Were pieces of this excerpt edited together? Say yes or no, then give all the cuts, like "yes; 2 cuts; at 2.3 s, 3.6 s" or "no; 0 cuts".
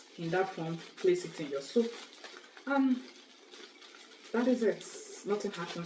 no; 0 cuts